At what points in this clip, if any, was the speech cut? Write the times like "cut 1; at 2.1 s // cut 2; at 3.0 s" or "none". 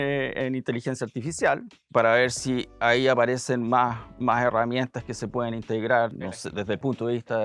cut 1; at 1.7 s // cut 2; at 6.3 s